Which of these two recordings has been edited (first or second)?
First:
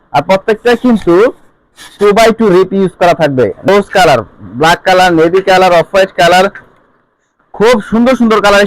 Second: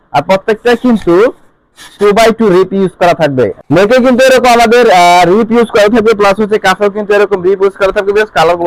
first